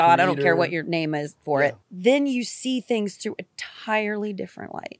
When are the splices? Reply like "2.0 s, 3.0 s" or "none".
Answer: 1.9 s